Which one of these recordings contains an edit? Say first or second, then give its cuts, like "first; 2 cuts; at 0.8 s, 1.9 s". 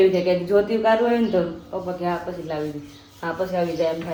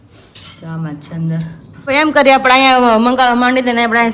second; 1 cut; at 1.9 s